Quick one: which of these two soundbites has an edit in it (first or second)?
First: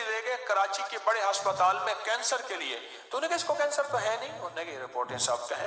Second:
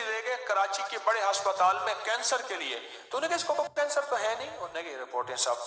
first